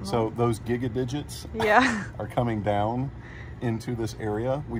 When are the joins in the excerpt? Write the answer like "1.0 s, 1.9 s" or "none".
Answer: none